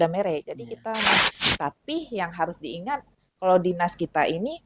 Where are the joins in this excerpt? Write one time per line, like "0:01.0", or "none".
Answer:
0:01.2